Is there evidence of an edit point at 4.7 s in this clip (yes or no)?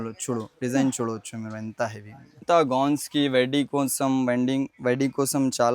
no